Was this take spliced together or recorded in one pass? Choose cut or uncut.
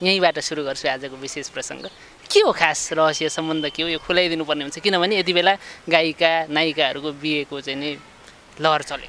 uncut